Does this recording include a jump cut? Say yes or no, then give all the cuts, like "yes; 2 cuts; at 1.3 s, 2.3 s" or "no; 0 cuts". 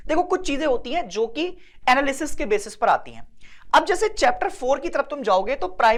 no; 0 cuts